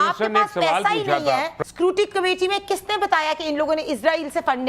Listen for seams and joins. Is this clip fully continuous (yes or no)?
no